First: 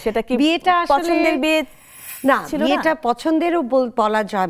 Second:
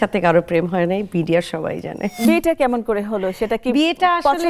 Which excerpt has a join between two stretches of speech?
second; 1 cut; at 2.1 s

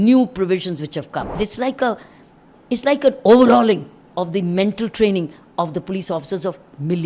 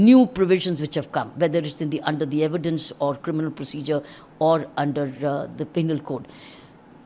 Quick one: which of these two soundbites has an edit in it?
first; 1 cut; at 1.4 s

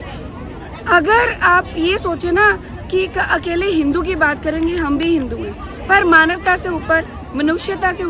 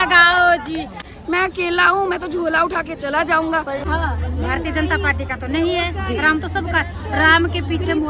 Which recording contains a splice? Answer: second; 2 cuts; at 1.1 s, 3.8 s

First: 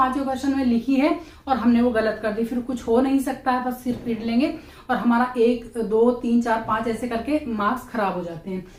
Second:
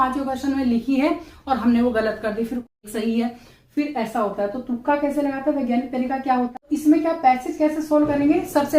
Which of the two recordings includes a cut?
second; 2 cuts; at 2.7 s, 6.5 s

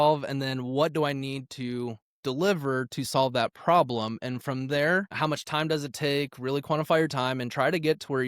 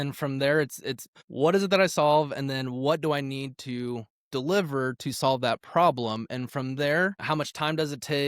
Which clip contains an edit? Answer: second; 1 cut; at 1.1 s

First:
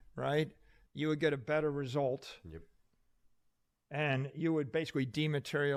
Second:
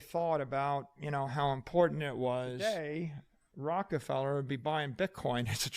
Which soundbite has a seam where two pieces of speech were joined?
second; 1 cut; at 2.6 s

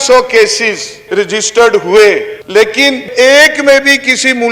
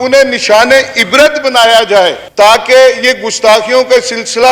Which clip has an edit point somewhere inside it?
first; 2 cuts; at 1.0 s, 3.1 s

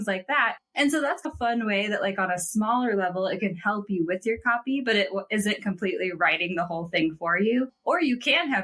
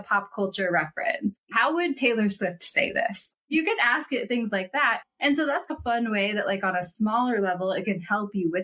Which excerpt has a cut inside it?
second; 2 cuts; at 1.4 s, 3.4 s

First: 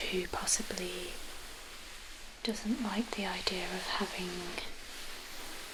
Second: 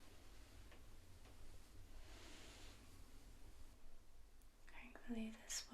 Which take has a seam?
second; 1 cut; at 3.7 s

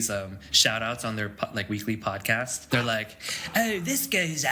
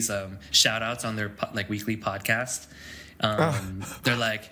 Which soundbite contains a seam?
first; 1 cut; at 2.6 s

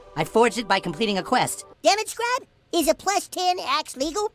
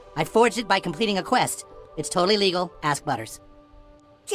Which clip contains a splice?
first; 1 cut; at 1.6 s

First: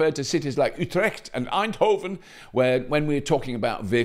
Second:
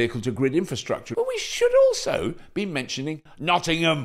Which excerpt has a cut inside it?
second; 1 cut; at 1.1 s

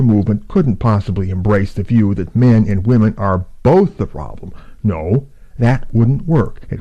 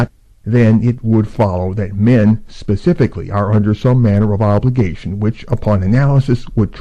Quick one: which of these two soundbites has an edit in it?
first; 1 cut; at 0.9 s

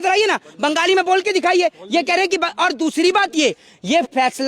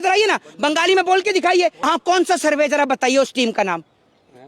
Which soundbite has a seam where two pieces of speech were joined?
second; 1 cut; at 1.9 s

